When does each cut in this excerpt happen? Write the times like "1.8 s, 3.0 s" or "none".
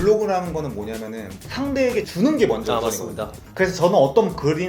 1.3 s